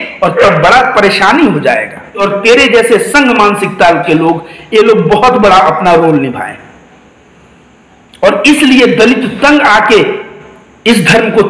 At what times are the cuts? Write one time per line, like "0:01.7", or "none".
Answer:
0:02.2